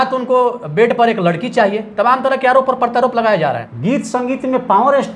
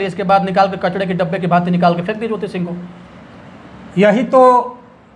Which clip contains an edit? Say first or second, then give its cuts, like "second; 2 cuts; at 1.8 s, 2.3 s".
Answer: first; 1 cut; at 3.7 s